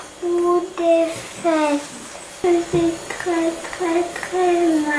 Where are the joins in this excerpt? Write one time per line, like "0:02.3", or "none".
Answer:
none